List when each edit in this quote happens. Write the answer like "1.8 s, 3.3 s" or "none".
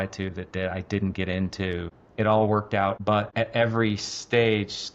2.0 s, 3.0 s